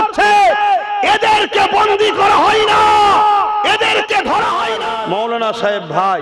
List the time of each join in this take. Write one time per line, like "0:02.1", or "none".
0:04.8

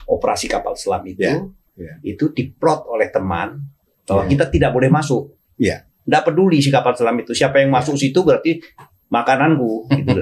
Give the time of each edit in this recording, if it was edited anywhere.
none

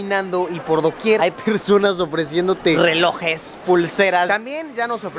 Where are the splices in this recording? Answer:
0:01.2
0:02.8
0:04.3

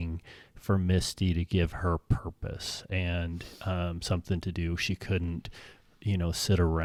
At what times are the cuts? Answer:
none

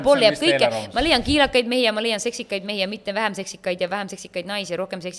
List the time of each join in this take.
none

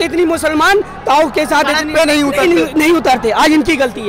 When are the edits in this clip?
none

